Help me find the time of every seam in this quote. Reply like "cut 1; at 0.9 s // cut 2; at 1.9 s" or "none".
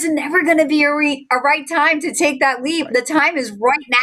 none